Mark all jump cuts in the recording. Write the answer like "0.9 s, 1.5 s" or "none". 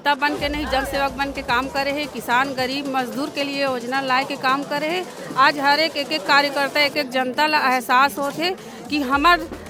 none